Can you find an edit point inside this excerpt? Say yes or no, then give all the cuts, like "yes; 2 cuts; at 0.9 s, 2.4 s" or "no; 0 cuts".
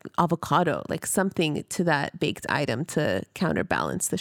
no; 0 cuts